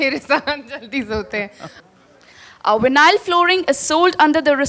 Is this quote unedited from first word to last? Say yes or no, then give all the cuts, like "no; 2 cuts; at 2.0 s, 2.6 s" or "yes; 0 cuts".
no; 1 cut; at 1.7 s